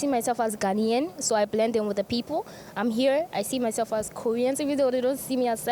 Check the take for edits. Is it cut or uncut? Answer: uncut